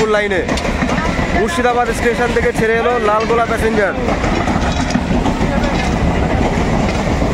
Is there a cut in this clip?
no; 0 cuts

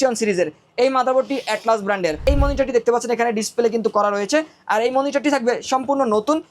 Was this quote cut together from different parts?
yes; 1 cut; at 2.2 s

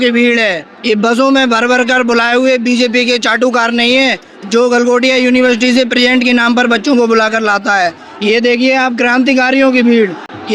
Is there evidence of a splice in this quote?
no; 0 cuts

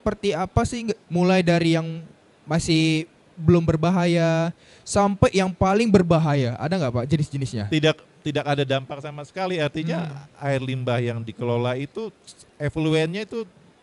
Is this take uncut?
no; 2 cuts; at 1.0 s, 7.6 s

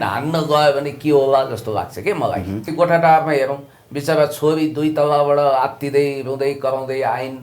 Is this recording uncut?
no; 1 cut; at 2.7 s

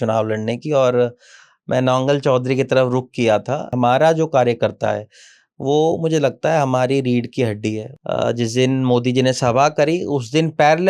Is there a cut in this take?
yes; 2 cuts; at 3.7 s, 7.9 s

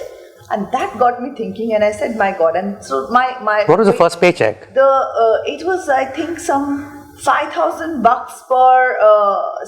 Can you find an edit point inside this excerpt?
no; 0 cuts

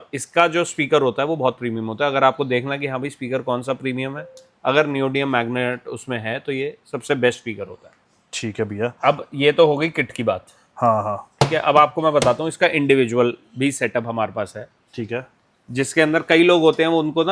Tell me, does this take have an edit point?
no; 0 cuts

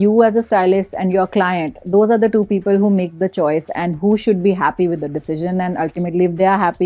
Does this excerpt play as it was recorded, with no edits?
yes; 0 cuts

